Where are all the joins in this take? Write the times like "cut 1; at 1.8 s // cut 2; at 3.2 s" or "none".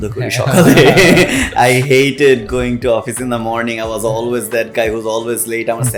none